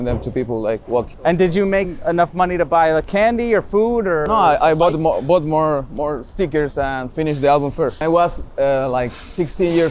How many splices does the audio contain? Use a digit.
3